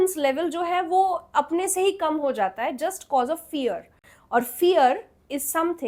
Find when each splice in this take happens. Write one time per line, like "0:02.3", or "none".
none